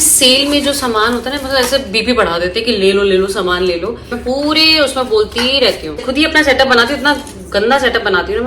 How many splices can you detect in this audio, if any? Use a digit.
2